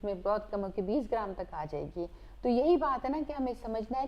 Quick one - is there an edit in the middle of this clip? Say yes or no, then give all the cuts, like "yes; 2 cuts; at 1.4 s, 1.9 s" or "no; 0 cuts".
no; 0 cuts